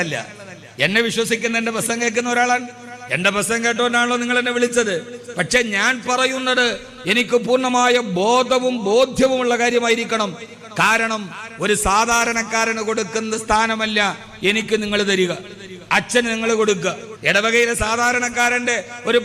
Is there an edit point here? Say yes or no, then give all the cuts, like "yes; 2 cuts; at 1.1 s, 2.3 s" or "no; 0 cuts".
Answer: yes; 1 cut; at 17.1 s